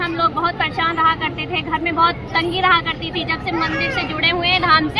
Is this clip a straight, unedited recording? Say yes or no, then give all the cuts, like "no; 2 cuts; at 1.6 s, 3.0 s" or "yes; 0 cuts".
yes; 0 cuts